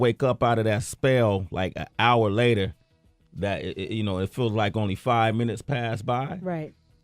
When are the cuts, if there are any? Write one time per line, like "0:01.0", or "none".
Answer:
0:01.2